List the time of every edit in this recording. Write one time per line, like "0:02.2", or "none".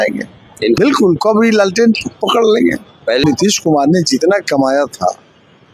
0:00.8
0:03.2